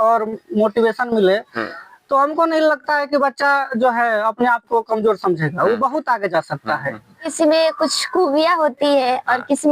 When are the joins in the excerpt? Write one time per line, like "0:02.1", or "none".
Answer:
0:07.2